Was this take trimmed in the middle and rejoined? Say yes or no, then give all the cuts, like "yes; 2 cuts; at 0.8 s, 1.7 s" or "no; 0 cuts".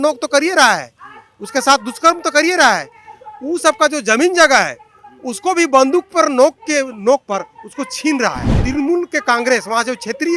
yes; 1 cut; at 8.6 s